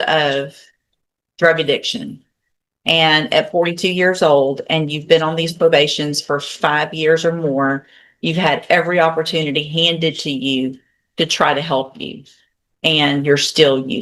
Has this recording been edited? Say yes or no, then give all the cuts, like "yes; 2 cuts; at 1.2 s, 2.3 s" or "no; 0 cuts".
no; 0 cuts